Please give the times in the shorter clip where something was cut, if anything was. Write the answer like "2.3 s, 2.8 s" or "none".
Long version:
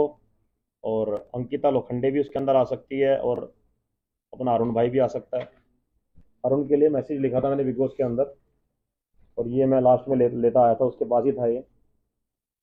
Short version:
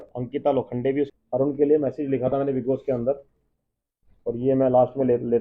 1.1 s